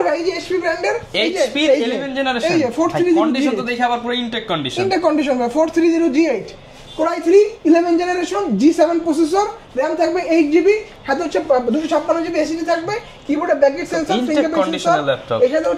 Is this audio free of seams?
yes; 0 cuts

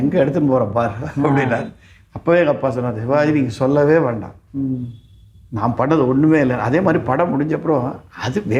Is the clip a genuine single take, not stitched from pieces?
yes; 0 cuts

